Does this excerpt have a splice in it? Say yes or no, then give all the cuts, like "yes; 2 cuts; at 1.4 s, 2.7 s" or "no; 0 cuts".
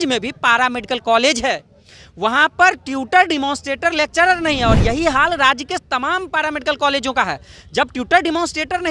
no; 0 cuts